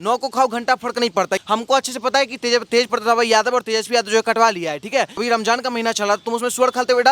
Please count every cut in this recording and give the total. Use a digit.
2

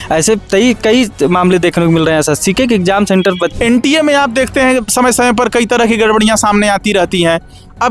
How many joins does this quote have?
1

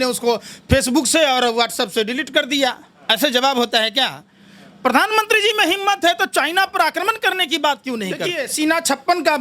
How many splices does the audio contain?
1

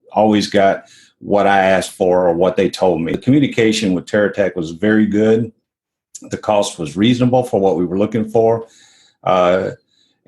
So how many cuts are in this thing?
1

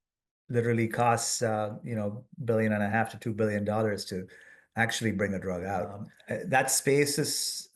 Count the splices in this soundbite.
1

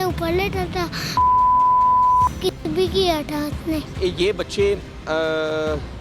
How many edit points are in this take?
0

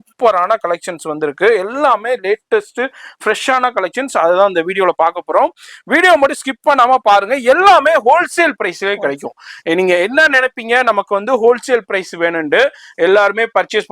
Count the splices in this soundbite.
0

